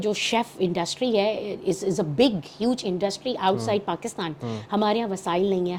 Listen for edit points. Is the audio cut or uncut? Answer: uncut